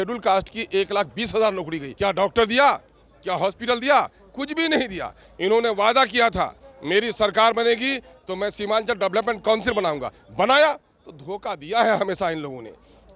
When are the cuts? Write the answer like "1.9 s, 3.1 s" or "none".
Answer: 1.8 s